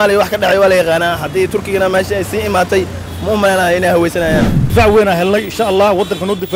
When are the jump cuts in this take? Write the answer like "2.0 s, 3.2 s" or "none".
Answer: 4.7 s